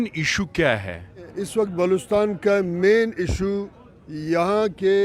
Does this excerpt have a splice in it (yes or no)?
yes